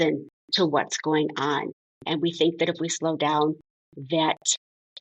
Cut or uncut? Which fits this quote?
cut